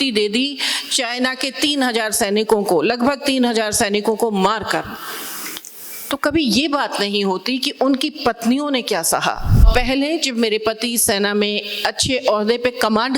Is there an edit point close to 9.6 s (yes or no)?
yes